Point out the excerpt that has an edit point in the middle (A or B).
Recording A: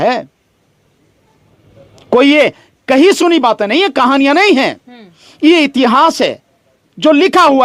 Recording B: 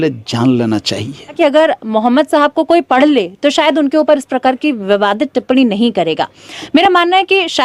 B